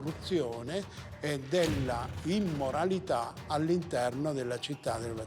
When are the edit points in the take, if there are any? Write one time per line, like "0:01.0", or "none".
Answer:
none